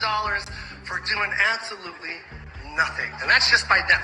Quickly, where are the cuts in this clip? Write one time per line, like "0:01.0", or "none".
0:03.1

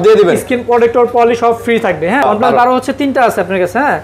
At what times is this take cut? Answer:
0:02.2

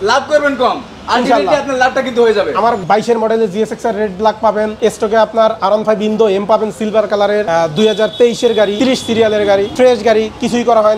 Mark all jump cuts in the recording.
0:02.8
0:04.7
0:07.5
0:08.7
0:09.7

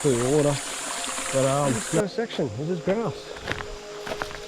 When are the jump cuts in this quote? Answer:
0:02.0

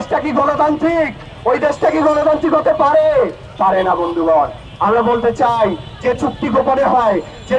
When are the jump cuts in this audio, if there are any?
none

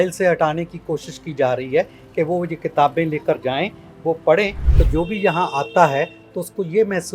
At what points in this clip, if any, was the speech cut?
0:04.7

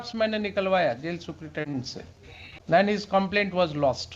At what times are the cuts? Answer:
0:02.7

